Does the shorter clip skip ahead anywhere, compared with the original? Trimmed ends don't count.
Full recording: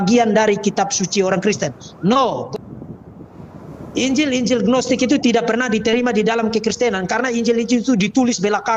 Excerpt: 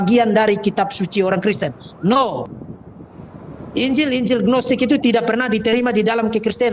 yes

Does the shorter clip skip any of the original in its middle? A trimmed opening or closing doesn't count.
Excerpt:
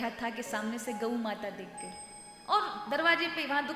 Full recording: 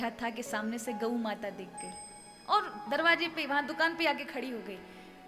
no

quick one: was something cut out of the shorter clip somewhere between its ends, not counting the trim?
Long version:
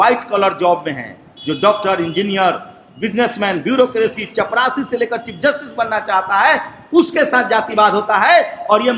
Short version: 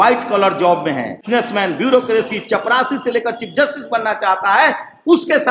yes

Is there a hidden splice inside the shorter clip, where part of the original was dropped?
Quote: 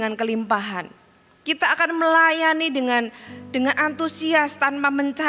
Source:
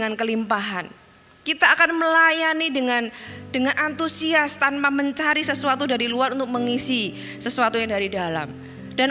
no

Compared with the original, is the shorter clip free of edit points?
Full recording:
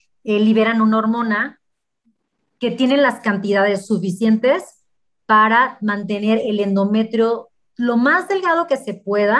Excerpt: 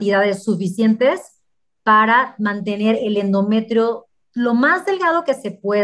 yes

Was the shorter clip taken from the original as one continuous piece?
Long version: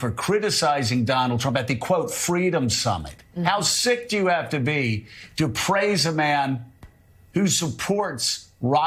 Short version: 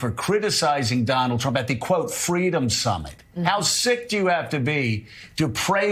yes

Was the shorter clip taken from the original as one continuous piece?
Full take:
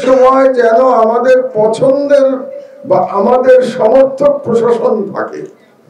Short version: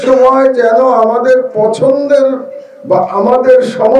yes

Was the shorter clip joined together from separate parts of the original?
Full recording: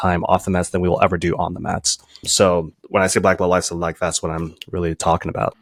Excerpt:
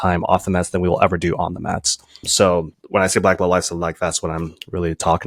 no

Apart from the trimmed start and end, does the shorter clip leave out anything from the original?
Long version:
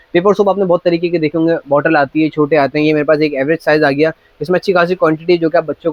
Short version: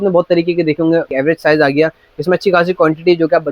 yes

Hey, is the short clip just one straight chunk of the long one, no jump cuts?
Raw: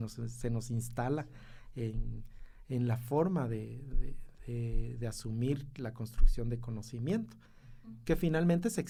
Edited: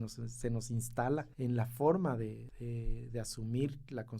no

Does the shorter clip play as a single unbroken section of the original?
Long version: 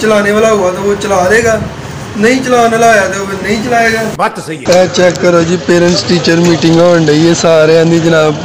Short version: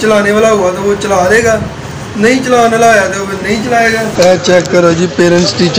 no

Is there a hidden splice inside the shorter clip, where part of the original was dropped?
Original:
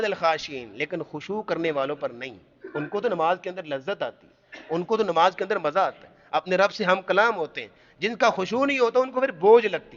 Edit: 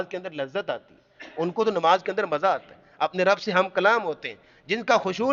no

